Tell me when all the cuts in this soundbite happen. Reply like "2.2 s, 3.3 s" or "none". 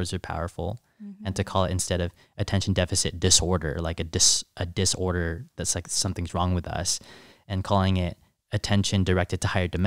none